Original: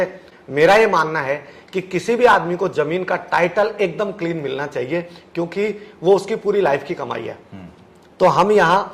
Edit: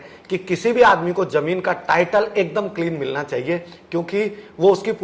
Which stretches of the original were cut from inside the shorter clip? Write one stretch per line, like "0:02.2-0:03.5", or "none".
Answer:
none